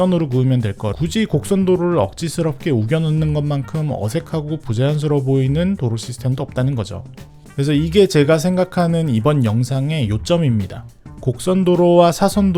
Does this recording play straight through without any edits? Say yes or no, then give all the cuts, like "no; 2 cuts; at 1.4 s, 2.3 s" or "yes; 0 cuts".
yes; 0 cuts